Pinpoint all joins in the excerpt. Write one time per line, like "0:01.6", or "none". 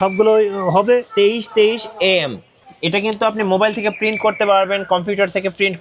0:01.1